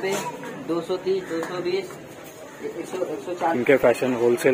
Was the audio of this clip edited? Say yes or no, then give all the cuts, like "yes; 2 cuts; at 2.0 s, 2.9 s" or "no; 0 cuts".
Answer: yes; 1 cut; at 3.6 s